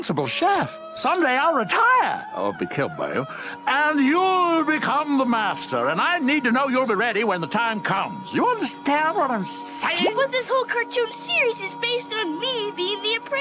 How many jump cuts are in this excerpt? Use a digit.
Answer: 1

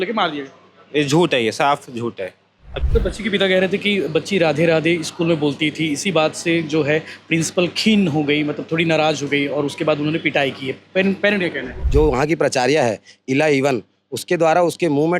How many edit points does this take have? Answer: 2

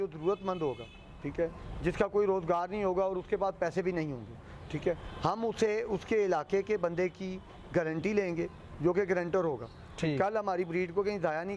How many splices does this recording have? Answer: 0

